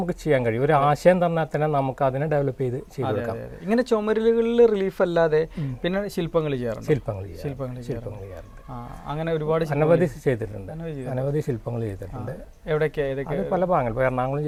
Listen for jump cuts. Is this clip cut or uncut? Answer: uncut